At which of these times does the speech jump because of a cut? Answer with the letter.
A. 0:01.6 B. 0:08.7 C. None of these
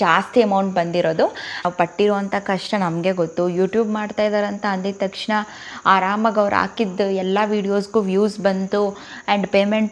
A